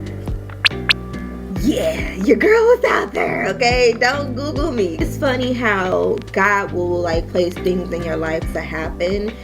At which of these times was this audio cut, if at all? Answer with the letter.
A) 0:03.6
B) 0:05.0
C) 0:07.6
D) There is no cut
B